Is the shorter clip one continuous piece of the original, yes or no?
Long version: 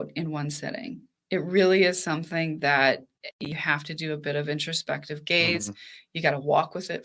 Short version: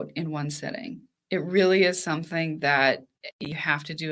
yes